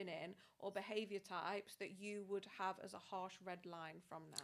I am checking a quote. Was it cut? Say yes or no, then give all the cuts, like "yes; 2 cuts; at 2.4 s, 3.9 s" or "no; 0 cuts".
no; 0 cuts